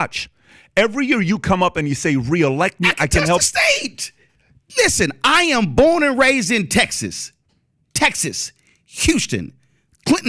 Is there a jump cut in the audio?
no; 0 cuts

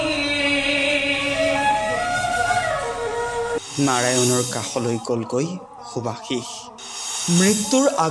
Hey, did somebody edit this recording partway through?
yes; 1 cut; at 3.5 s

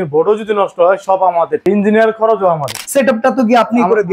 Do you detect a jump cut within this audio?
yes; 2 cuts; at 1.6 s, 2.8 s

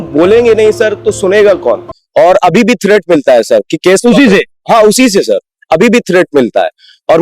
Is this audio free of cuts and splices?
no; 1 cut; at 2.0 s

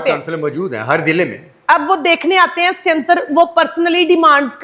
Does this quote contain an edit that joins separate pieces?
no; 0 cuts

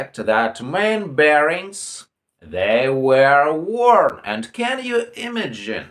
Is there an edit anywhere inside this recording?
no; 0 cuts

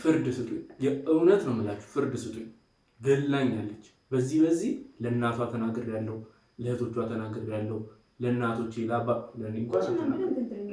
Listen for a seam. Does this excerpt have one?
no; 0 cuts

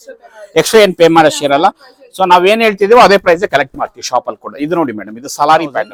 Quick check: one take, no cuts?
yes; 0 cuts

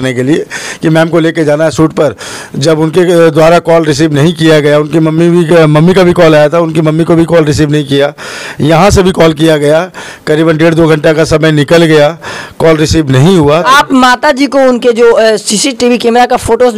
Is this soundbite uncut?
no; 1 cut; at 13.7 s

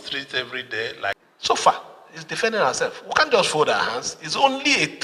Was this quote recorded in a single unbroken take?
no; 1 cut; at 1.2 s

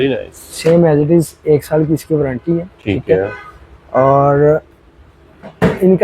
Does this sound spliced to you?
no; 0 cuts

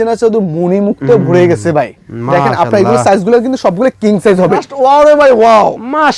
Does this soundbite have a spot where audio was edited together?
yes; 1 cut; at 4.7 s

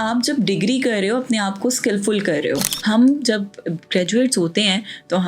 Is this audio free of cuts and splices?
no; 1 cut; at 2.7 s

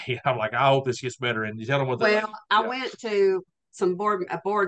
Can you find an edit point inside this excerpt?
yes; 1 cut; at 3.6 s

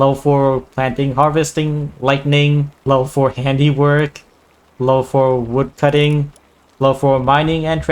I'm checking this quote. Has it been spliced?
yes; 2 cuts; at 2.8 s, 5.7 s

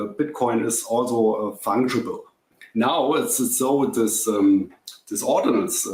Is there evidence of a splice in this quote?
yes; 1 cut; at 2.6 s

